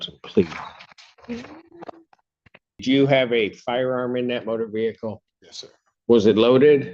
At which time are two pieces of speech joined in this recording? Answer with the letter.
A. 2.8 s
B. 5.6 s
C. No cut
A